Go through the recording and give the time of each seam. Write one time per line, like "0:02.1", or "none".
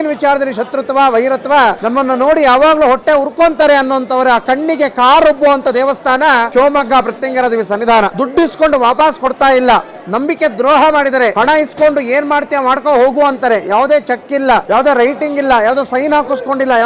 0:01.8
0:06.5
0:08.1
0:11.3
0:14.7

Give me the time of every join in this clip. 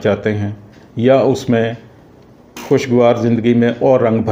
none

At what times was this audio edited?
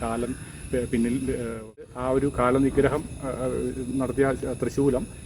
0:01.9

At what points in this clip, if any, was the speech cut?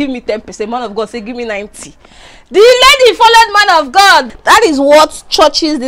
0:04.3

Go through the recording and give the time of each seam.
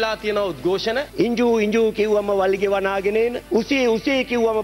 0:01.1

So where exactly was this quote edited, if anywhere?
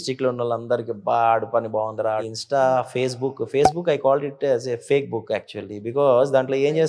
0:02.3

